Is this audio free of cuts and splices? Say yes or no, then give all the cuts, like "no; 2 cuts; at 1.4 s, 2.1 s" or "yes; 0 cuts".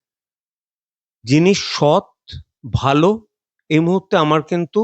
yes; 0 cuts